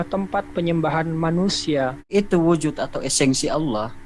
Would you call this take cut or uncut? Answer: cut